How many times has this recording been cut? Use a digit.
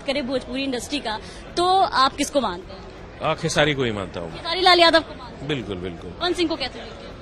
1